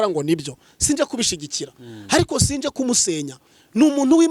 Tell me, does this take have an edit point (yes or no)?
no